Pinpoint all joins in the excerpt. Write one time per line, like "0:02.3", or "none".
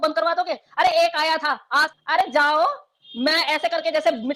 0:01.9